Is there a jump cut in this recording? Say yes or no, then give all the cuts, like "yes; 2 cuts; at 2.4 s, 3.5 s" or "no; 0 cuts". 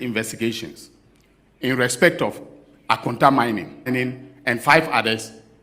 yes; 1 cut; at 3.9 s